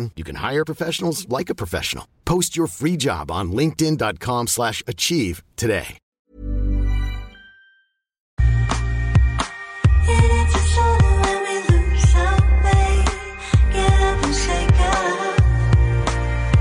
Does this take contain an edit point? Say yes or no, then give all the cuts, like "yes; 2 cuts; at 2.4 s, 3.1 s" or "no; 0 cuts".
no; 0 cuts